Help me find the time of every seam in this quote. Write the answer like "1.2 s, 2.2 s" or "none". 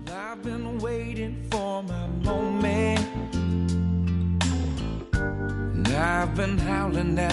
none